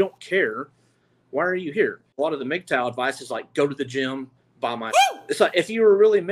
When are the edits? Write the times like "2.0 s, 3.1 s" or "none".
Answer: 2.1 s, 5.0 s